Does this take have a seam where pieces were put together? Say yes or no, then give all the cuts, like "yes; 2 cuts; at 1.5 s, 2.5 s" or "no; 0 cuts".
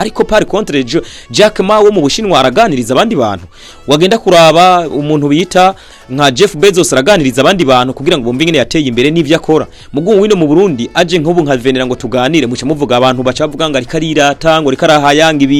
no; 0 cuts